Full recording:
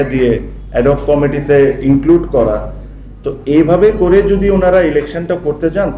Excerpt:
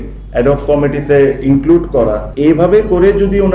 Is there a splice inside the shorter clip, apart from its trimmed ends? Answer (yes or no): yes